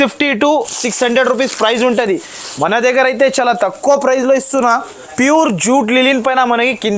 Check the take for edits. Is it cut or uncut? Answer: cut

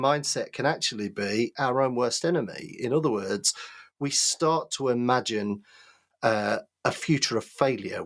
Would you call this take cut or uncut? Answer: uncut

